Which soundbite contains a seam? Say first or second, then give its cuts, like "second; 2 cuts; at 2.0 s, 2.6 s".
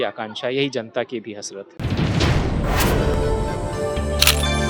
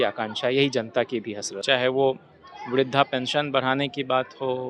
second; 1 cut; at 1.5 s